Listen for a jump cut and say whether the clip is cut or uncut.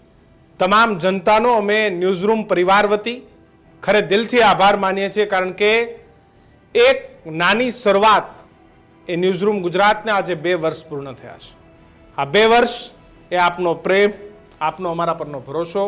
uncut